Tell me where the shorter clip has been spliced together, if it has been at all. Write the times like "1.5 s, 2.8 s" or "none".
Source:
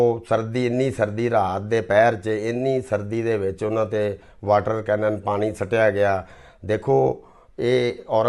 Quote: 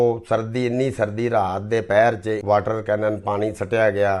2.4 s